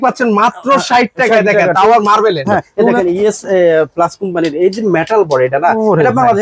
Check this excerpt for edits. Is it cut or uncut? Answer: cut